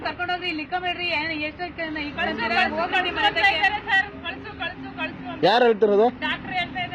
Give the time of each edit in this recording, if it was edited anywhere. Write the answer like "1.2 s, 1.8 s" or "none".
2.7 s